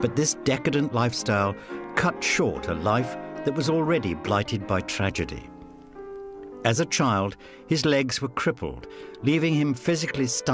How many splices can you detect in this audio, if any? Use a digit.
1